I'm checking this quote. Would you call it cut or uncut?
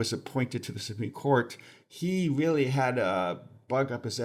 uncut